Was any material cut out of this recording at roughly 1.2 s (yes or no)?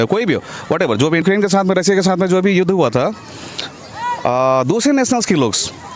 yes